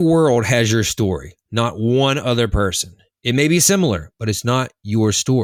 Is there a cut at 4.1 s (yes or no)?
no